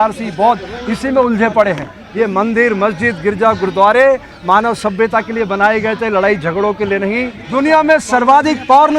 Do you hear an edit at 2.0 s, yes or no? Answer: yes